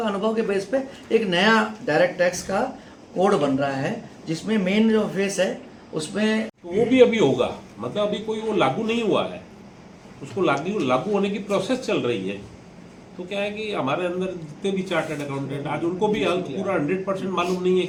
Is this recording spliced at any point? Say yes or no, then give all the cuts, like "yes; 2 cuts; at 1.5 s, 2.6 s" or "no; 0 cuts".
no; 0 cuts